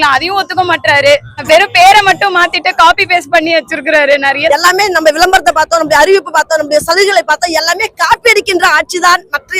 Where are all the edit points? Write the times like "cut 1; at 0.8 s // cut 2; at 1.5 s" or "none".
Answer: cut 1; at 1.3 s // cut 2; at 4.5 s